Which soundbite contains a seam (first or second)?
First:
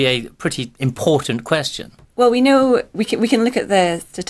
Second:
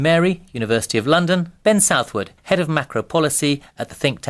second